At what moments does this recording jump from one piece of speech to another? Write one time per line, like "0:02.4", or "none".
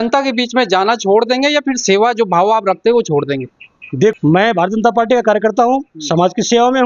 0:04.2